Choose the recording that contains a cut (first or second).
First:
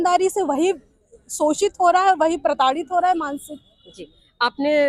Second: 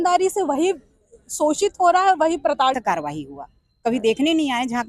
second